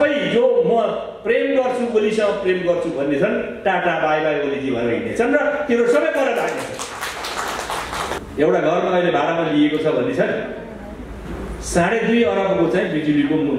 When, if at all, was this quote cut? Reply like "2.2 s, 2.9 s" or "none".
8.2 s